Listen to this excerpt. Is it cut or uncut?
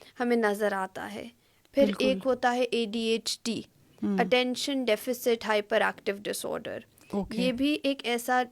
uncut